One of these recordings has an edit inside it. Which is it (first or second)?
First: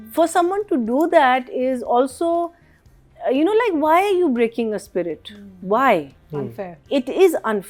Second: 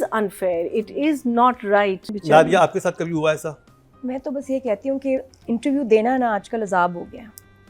second